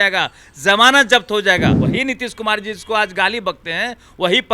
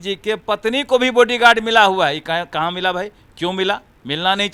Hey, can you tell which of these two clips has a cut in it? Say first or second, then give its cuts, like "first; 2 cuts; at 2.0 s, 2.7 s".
first; 1 cut; at 1.8 s